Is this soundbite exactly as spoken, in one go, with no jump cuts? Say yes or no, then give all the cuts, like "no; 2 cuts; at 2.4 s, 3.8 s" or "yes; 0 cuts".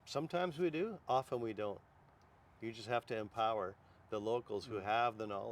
yes; 0 cuts